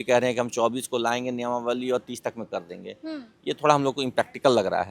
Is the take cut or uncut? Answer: uncut